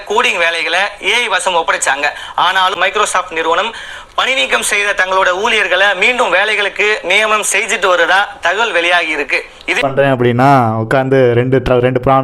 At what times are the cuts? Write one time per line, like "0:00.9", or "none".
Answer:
0:02.7
0:09.8